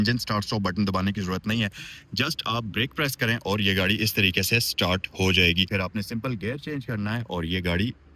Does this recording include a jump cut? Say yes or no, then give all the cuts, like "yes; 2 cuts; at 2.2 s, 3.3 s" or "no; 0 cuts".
no; 0 cuts